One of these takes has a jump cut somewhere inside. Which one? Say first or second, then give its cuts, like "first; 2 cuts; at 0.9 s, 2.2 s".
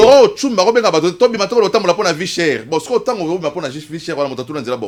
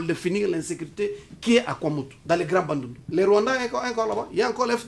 second; 2 cuts; at 2.1 s, 3.0 s